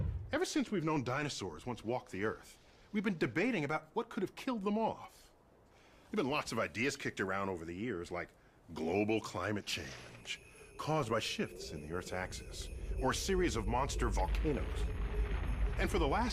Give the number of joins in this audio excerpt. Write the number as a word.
zero